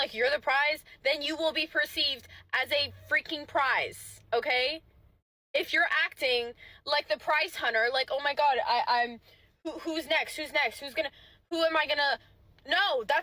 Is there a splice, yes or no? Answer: no